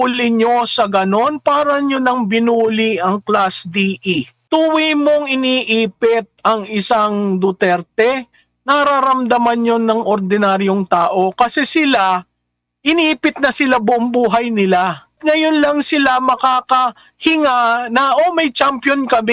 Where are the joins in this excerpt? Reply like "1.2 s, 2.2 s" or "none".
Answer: 4.4 s, 15.2 s